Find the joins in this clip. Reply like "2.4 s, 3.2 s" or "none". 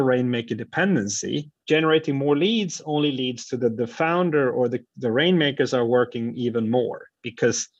1.5 s